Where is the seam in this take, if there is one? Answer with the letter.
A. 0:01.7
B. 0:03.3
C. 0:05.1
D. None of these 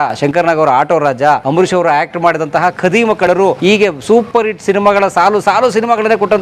B